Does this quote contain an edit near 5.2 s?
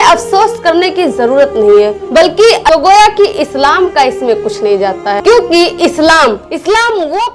yes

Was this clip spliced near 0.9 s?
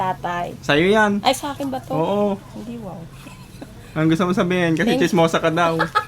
no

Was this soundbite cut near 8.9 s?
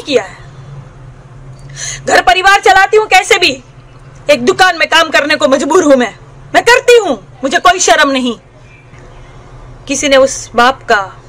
yes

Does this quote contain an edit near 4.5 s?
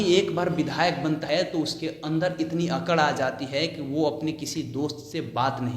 no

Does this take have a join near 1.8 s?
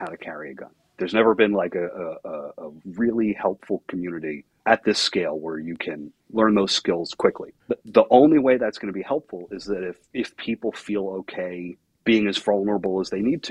no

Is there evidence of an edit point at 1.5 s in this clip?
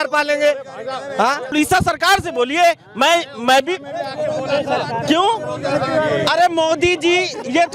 yes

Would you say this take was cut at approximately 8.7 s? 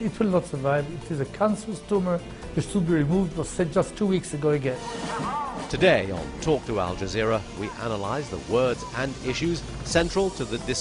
no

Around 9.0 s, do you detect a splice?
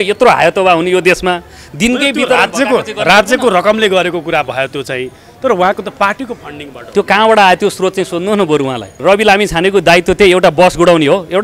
yes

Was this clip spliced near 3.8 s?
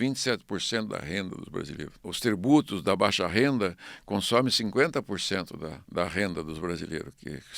no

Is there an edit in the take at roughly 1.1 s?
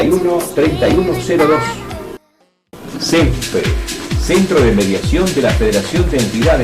no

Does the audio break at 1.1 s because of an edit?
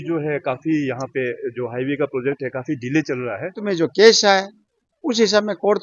no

